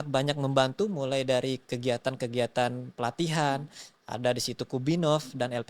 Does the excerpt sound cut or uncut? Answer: uncut